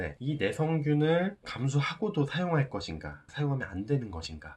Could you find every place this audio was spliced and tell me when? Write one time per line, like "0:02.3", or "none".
0:03.2